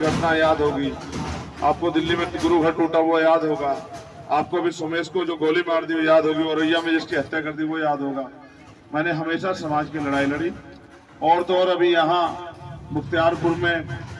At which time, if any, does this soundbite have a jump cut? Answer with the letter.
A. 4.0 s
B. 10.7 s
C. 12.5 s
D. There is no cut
D